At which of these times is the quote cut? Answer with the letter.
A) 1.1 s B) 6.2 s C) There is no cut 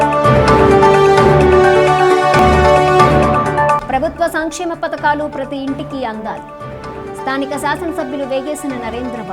A